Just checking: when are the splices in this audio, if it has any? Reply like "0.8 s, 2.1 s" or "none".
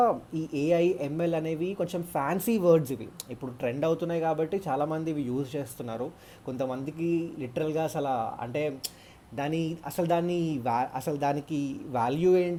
none